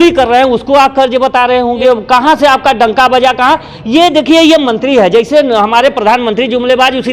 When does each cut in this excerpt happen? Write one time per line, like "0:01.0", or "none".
0:01.8